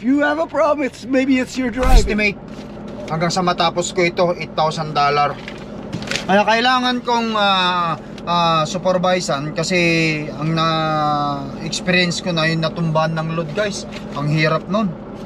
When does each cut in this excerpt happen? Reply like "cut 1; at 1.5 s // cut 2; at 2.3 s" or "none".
cut 1; at 2.1 s